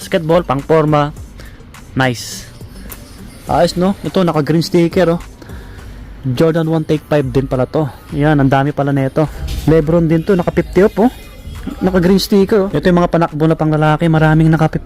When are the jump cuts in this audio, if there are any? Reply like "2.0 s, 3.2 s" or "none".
9.5 s, 12.7 s